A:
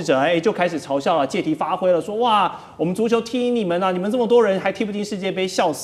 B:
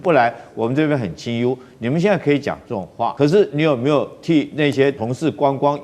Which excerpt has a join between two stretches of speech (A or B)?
B